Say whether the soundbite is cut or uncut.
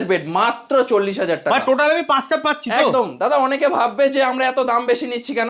uncut